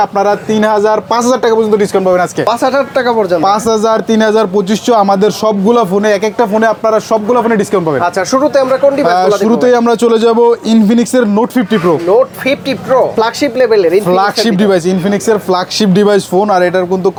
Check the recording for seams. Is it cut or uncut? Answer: uncut